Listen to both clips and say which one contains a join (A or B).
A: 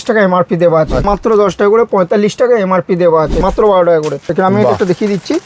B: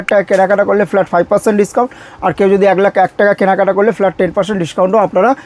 A